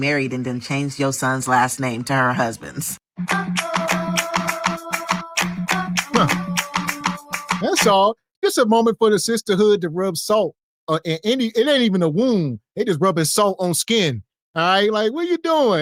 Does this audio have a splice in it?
no; 0 cuts

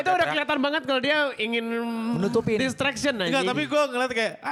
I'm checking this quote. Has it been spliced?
no; 0 cuts

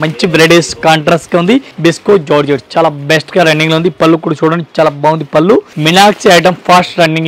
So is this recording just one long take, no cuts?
no; 2 cuts; at 1.7 s, 5.7 s

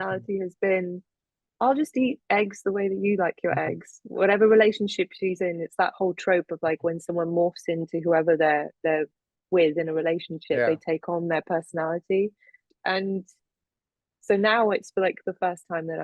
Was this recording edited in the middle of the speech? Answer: yes; 1 cut; at 12.7 s

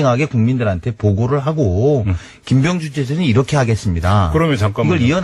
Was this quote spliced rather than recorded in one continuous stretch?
yes; 1 cut; at 2.5 s

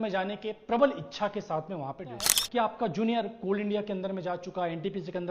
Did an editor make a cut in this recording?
yes; 1 cut; at 2.4 s

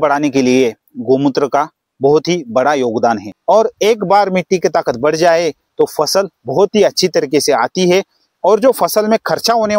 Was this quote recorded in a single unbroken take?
no; 1 cut; at 3.3 s

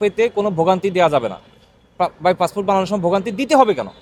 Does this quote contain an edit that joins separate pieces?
no; 0 cuts

